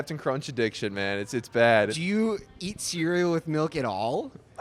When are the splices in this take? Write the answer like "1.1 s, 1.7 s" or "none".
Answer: 2.0 s